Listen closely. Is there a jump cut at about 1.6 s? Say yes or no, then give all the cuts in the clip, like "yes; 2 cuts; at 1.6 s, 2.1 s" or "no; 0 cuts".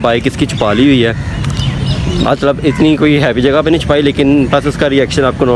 no; 0 cuts